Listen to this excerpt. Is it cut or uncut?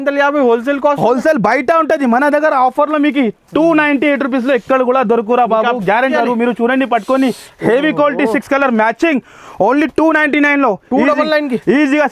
cut